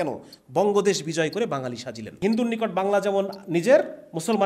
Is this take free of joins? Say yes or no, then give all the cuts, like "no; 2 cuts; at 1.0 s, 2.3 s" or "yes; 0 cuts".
no; 1 cut; at 2.1 s